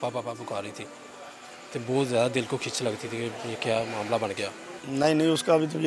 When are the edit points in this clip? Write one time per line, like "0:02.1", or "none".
0:04.8